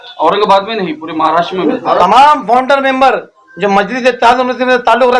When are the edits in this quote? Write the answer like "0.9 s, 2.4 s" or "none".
2.0 s